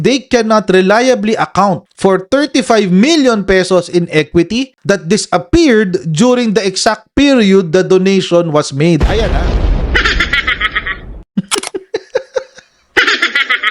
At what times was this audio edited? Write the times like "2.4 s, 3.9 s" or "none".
11.2 s